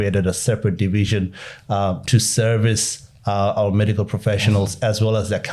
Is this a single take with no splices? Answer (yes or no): yes